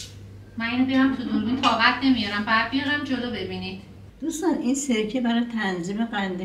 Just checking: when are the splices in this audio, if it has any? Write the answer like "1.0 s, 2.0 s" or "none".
4.1 s